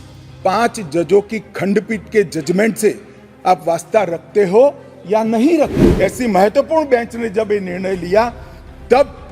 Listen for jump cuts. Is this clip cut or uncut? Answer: cut